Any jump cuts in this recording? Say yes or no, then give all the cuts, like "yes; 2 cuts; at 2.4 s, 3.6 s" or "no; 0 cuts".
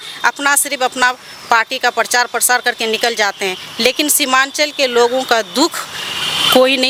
no; 0 cuts